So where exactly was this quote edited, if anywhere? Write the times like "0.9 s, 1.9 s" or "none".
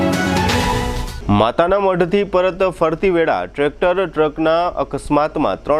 1.0 s